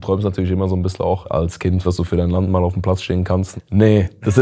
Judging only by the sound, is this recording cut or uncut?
cut